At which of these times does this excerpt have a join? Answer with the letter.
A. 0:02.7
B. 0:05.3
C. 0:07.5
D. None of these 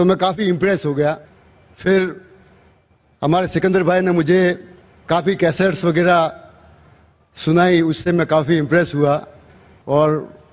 C